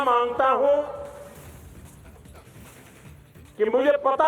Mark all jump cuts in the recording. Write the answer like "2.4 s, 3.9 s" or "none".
none